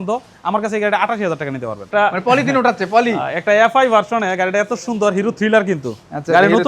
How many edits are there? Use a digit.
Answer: 1